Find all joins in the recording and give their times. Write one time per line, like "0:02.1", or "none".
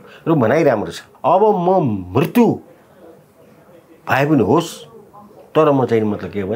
0:01.1